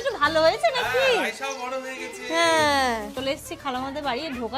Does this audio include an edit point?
yes; 1 cut; at 3.1 s

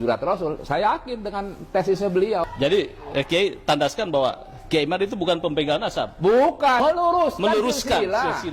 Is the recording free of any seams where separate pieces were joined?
no; 2 cuts; at 2.5 s, 6.8 s

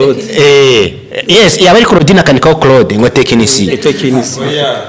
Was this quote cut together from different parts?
no; 0 cuts

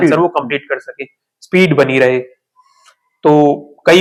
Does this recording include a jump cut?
no; 0 cuts

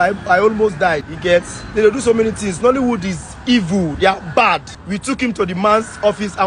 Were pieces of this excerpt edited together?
yes; 2 cuts; at 1.1 s, 4.7 s

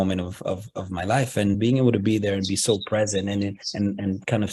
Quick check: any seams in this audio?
yes; 1 cut; at 1.6 s

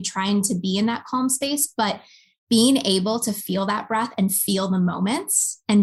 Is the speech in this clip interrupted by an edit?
no; 0 cuts

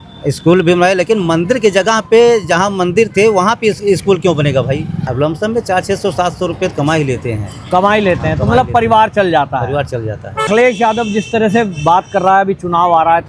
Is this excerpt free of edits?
no; 2 cuts; at 5.0 s, 10.5 s

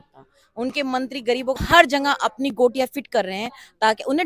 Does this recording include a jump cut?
yes; 1 cut; at 1.6 s

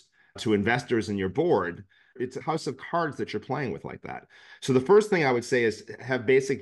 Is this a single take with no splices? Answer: no; 1 cut; at 2.1 s

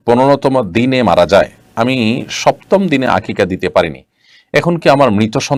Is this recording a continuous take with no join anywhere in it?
yes; 0 cuts

